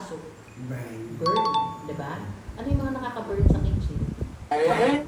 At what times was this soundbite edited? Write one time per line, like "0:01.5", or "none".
none